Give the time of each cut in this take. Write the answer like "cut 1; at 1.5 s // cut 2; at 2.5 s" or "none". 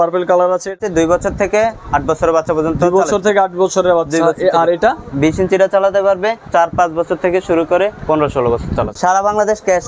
cut 1; at 0.8 s // cut 2; at 5.1 s // cut 3; at 6.5 s // cut 4; at 8.0 s // cut 5; at 8.9 s

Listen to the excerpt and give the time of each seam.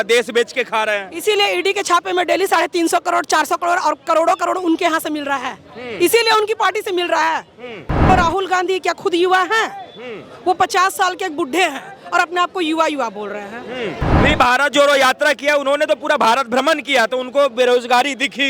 cut 1; at 8.1 s // cut 2; at 14.2 s

